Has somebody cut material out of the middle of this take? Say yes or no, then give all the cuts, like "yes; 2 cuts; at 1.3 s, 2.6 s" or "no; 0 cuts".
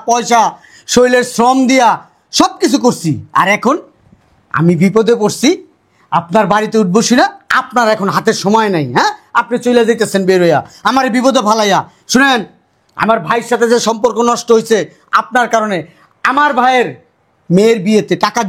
no; 0 cuts